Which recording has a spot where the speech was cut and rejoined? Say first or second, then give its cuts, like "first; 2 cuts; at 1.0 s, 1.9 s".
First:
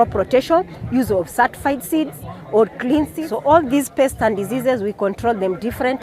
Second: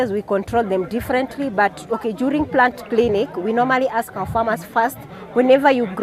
first; 1 cut; at 3.2 s